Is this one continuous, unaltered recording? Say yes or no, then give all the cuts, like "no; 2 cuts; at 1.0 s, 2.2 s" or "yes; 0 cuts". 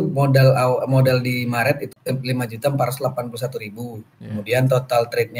no; 1 cut; at 1.8 s